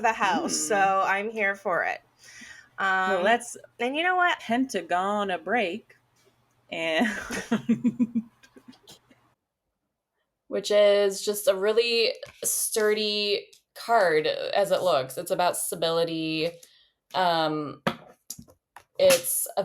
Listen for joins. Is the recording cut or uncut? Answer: cut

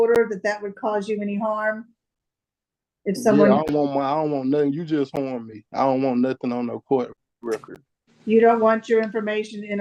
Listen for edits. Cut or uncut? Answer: uncut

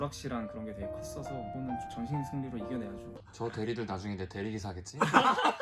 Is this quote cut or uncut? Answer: cut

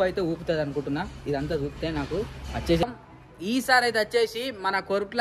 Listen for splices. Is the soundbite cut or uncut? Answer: cut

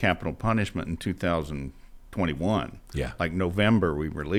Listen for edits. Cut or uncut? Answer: uncut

